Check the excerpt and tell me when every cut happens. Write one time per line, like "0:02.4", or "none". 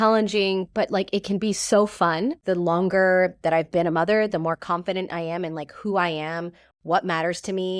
0:02.4